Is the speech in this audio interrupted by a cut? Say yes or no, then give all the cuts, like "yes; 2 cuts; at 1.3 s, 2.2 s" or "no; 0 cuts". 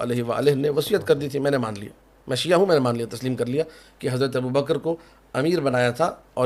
no; 0 cuts